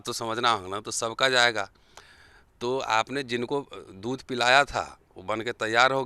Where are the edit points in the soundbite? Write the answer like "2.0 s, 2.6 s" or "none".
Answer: none